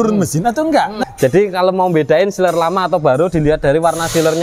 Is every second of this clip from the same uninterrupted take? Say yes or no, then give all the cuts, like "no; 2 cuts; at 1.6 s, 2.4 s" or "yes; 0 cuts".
no; 1 cut; at 0.9 s